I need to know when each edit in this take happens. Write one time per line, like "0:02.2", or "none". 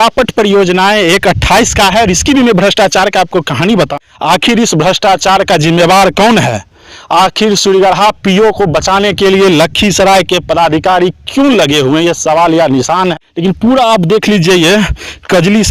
0:03.9
0:13.1